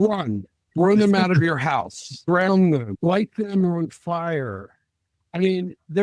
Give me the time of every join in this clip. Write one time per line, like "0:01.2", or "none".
0:02.1
0:02.9